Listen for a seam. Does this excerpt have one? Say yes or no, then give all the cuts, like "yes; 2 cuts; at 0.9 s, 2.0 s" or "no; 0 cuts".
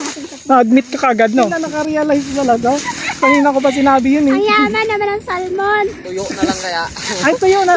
yes; 1 cut; at 1.5 s